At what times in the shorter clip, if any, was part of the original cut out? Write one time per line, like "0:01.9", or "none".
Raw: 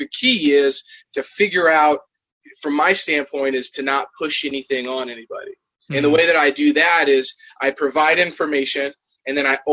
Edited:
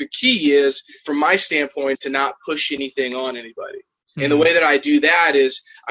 0:00.9
0:02.0